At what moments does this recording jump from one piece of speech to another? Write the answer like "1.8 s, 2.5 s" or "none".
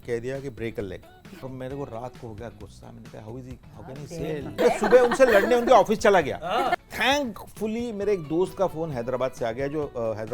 1.5 s, 4.6 s, 6.8 s